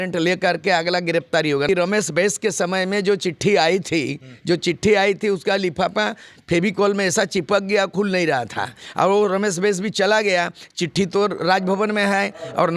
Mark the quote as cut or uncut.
cut